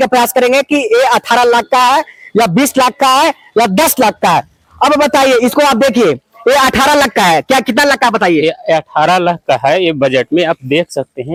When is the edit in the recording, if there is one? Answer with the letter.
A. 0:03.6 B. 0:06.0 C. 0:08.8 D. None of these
D